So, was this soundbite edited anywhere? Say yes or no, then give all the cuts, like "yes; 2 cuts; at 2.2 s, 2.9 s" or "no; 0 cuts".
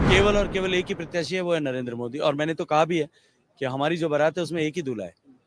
no; 0 cuts